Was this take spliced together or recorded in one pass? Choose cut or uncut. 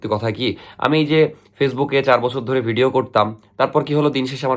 uncut